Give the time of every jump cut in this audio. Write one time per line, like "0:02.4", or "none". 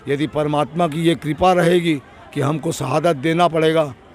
none